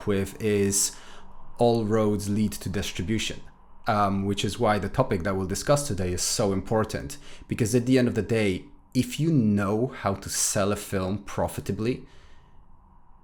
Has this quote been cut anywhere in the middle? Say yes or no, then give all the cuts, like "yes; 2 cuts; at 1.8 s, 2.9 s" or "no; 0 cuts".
no; 0 cuts